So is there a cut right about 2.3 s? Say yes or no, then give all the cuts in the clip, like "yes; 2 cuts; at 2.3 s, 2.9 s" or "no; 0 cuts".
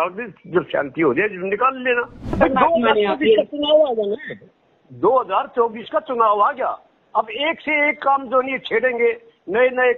yes; 1 cut; at 2.3 s